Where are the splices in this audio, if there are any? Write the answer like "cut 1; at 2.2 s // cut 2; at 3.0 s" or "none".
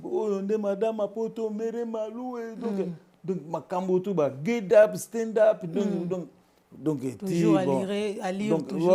none